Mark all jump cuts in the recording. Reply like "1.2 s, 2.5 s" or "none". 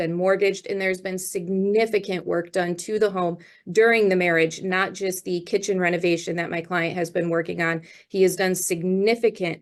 none